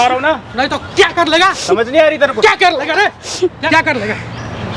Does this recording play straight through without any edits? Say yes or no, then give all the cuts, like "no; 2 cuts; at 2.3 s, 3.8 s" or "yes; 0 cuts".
no; 1 cut; at 3.6 s